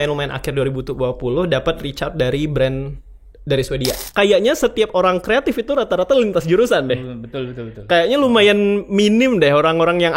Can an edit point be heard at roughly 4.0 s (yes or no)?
yes